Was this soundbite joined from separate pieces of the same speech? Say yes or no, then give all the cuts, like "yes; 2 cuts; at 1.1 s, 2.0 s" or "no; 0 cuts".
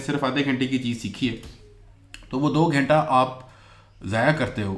no; 0 cuts